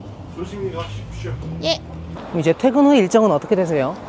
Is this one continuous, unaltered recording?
no; 1 cut; at 2.2 s

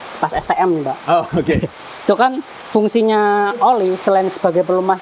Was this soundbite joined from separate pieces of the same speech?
no; 0 cuts

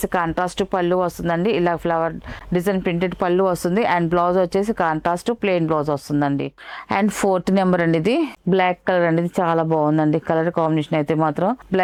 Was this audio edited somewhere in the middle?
no; 0 cuts

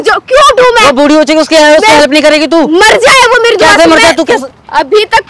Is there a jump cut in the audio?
yes; 1 cut; at 4.3 s

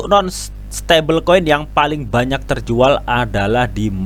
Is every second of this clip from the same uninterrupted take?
yes; 0 cuts

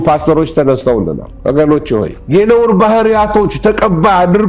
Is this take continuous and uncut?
no; 1 cut; at 2.2 s

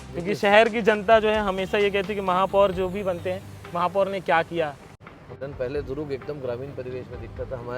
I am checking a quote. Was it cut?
yes; 1 cut; at 5.0 s

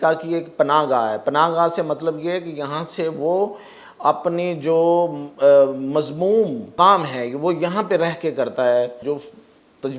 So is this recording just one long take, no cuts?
no; 2 cuts; at 6.7 s, 9.0 s

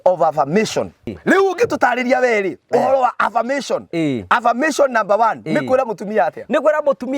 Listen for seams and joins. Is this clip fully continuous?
no; 1 cut; at 1.1 s

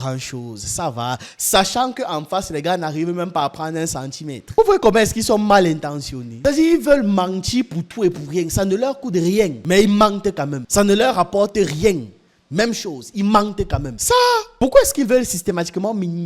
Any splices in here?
no; 0 cuts

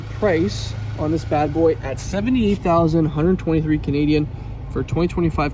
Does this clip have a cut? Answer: no; 0 cuts

